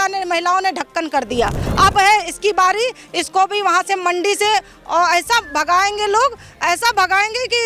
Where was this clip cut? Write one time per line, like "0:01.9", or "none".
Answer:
0:01.6